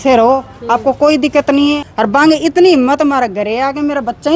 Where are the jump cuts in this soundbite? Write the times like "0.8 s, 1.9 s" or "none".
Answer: 1.8 s

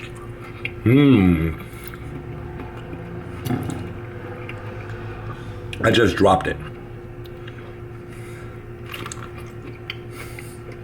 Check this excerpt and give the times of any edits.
6.7 s

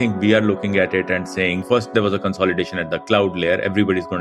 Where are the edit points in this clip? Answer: 1.6 s

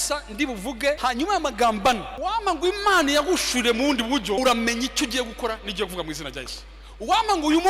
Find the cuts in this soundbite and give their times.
1.0 s, 2.1 s, 4.4 s

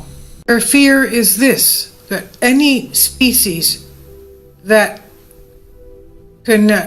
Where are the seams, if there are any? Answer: 3.4 s

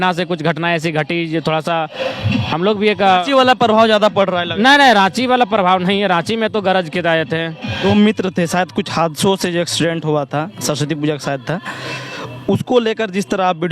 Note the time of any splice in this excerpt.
7.8 s

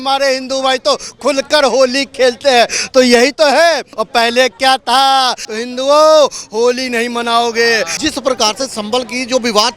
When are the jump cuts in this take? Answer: 3.9 s, 5.4 s, 7.9 s

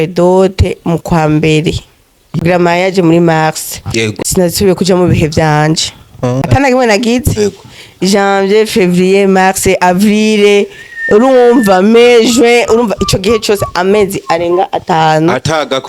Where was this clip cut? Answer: 2.4 s, 4.1 s, 6.5 s

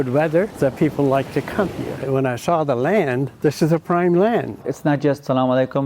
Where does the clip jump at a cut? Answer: 2.0 s, 4.7 s

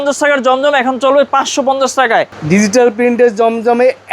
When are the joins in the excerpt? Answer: 2.4 s

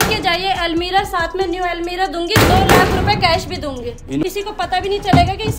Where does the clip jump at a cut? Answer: 4.2 s

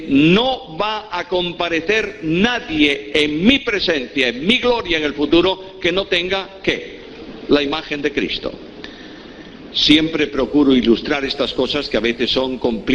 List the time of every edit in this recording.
3.3 s

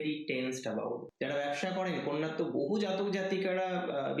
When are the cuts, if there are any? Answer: 1.1 s

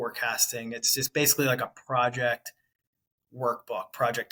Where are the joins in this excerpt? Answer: none

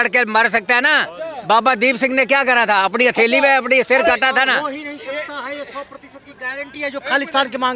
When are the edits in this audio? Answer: none

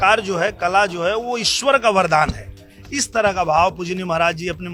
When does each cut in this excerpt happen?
none

